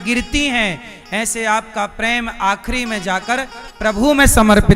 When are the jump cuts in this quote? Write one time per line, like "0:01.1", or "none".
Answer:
none

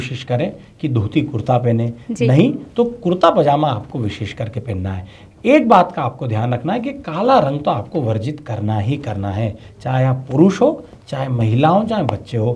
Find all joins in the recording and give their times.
none

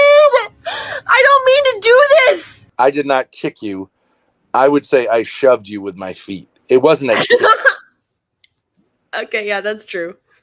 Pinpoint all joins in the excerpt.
0:02.6

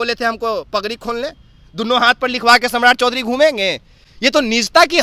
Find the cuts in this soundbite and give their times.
none

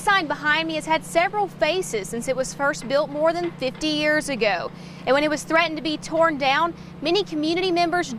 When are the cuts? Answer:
none

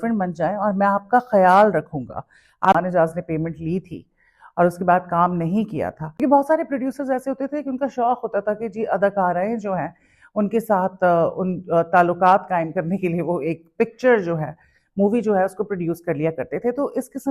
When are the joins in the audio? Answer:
0:02.7
0:06.0

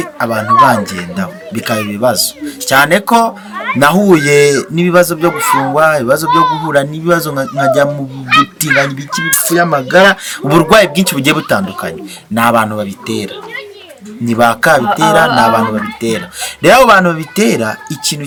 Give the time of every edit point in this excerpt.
none

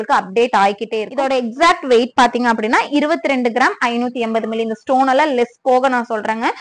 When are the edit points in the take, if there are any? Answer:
0:01.1

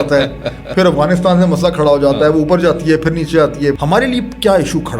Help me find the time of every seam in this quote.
0:03.8

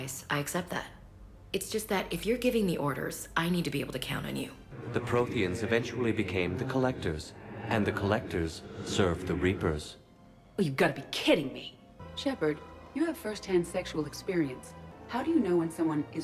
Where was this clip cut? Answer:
0:04.7
0:11.6
0:14.7

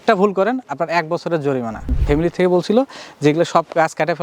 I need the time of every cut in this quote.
0:01.8

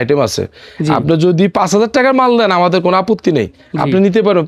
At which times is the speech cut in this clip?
none

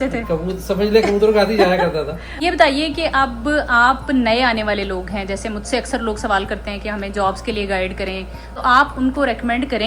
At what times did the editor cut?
0:02.2
0:08.5

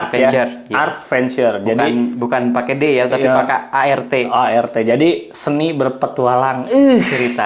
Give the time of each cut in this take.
none

